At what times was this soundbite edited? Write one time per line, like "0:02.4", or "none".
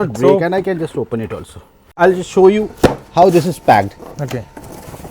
0:01.9